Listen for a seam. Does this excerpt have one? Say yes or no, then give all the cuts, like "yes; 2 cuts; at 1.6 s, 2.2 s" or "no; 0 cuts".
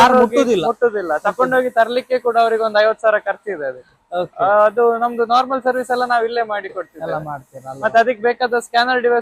no; 0 cuts